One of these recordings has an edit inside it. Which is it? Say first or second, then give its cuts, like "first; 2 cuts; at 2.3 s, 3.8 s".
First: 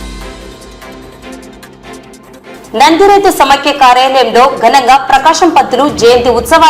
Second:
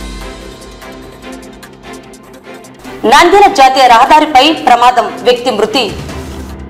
first; 1 cut; at 2.6 s